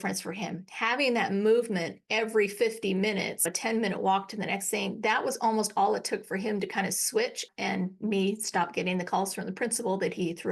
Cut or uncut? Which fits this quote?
uncut